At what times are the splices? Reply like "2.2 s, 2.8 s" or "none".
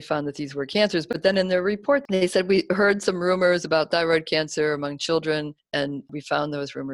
5.6 s

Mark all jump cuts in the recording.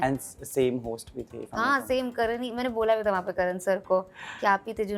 none

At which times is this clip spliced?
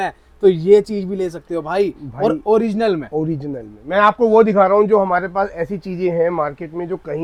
none

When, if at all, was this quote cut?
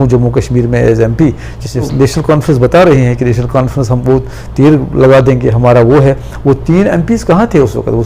1.9 s

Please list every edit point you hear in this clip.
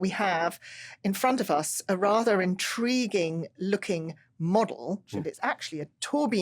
5.2 s

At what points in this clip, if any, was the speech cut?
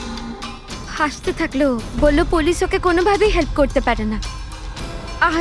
0.9 s

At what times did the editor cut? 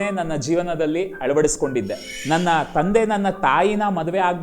1.6 s

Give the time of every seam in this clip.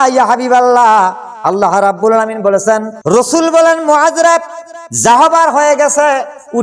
2.9 s

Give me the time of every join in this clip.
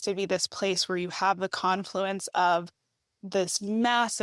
none

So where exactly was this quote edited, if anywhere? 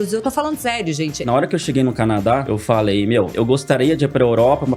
1.2 s, 2.5 s, 3.3 s

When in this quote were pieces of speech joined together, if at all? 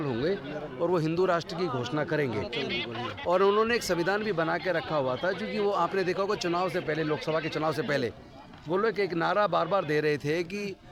none

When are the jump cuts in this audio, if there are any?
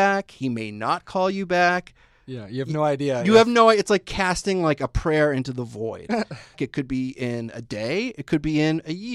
6.6 s

